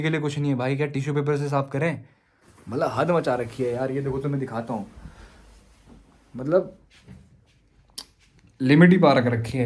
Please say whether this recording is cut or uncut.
uncut